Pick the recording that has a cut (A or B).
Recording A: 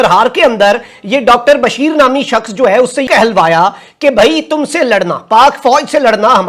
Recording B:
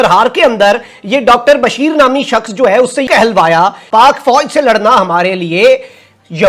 B